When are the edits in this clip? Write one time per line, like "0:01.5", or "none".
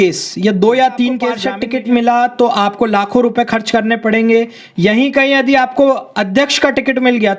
0:01.5